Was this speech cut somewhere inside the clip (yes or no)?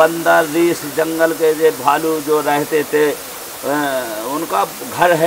no